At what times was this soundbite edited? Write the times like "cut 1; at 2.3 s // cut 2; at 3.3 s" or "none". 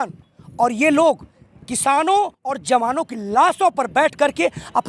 none